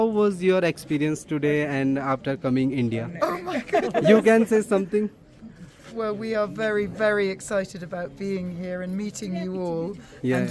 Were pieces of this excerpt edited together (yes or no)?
no